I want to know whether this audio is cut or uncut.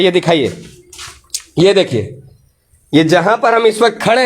uncut